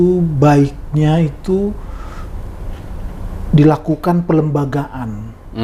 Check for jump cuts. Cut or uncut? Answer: uncut